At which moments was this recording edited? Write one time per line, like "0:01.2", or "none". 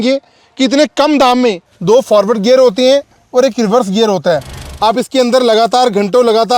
0:01.7
0:04.6